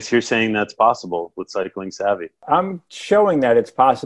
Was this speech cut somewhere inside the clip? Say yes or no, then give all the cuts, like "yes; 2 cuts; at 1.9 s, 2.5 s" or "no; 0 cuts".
yes; 1 cut; at 2.4 s